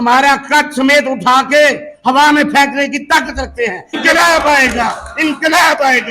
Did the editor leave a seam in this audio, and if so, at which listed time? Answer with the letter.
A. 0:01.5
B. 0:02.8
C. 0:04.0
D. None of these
C